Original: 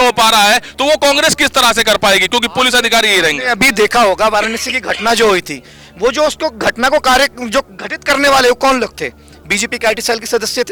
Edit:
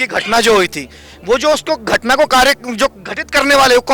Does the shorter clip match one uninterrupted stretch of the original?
yes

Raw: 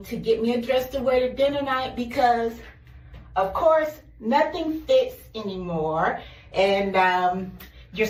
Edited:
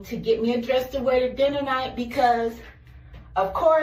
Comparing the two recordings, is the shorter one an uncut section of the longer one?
yes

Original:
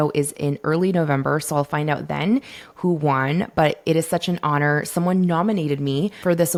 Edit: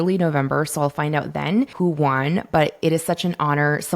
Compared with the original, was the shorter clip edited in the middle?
yes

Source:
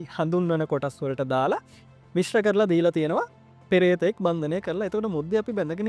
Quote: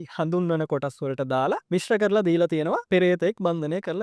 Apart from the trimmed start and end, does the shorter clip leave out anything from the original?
yes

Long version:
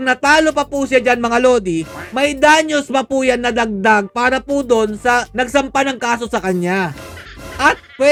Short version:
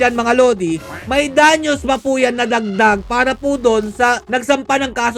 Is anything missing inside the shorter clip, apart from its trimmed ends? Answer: no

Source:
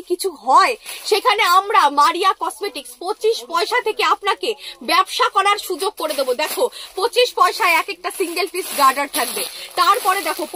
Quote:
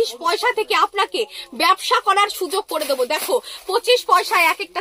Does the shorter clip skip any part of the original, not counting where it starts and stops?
no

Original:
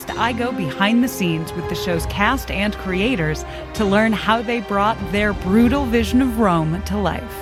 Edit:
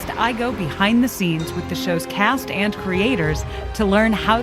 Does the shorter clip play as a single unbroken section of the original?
yes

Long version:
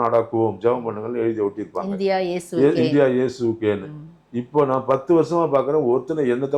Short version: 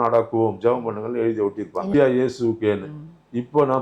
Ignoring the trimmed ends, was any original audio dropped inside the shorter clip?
yes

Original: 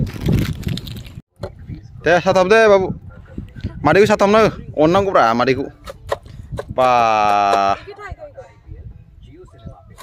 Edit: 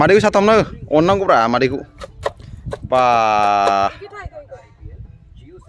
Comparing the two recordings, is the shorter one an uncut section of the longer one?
yes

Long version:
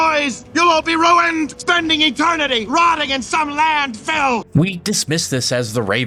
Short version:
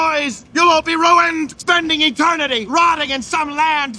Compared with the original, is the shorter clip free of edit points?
yes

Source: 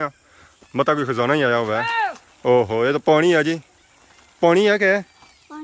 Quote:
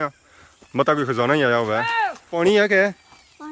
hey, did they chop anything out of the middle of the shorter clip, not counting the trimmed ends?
yes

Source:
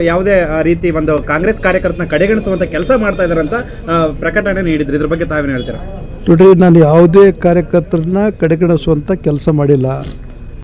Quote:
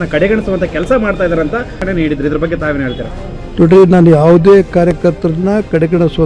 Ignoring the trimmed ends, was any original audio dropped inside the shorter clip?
yes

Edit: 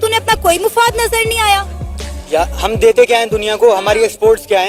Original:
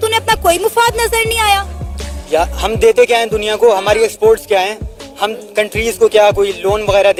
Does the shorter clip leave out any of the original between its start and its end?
no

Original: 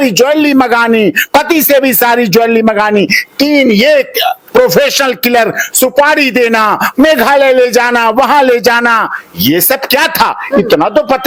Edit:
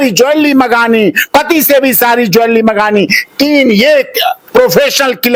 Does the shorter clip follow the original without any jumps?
yes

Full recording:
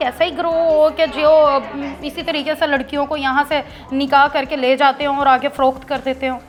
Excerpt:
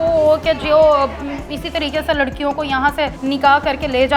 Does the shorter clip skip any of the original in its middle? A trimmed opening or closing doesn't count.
yes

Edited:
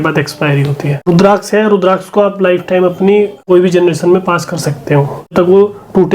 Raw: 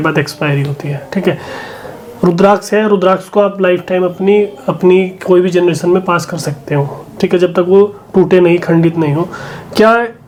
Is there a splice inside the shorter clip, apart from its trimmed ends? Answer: yes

